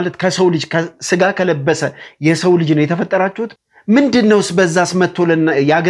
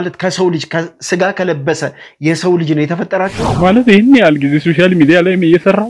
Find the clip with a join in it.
second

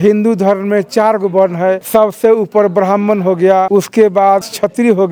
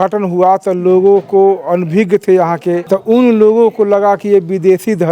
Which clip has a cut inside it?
second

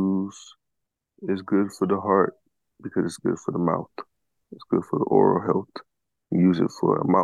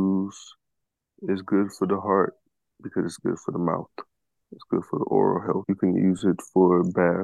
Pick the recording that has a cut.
second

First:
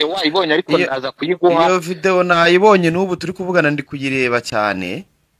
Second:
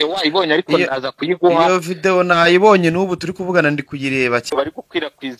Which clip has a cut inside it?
second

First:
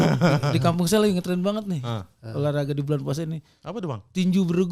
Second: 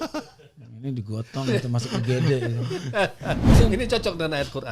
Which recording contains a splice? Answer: second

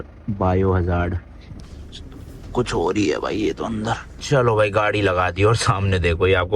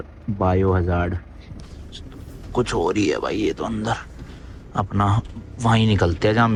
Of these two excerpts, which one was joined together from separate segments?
first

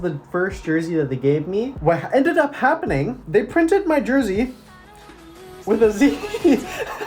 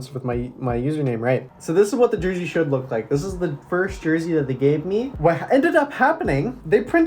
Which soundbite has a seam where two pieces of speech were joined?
second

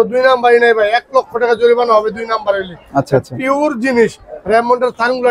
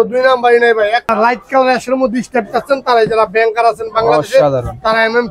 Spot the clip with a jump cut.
second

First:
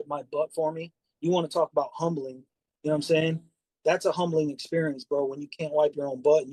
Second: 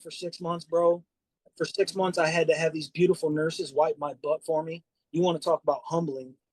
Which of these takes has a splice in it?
second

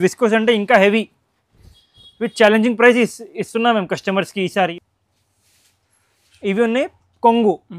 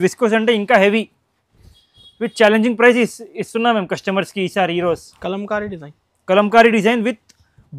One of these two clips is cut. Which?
first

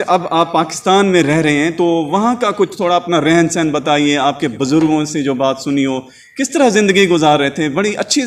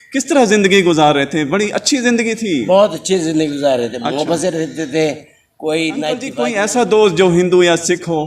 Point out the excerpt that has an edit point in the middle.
second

